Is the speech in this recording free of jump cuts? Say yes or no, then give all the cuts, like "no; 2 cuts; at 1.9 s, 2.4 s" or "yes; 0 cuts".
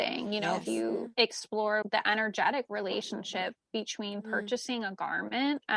no; 1 cut; at 1.8 s